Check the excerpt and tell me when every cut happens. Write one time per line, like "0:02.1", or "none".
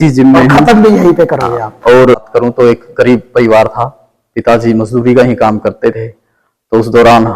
0:02.2